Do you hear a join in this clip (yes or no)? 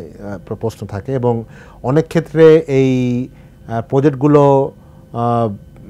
no